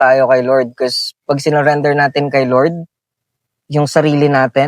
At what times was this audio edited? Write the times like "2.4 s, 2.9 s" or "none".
none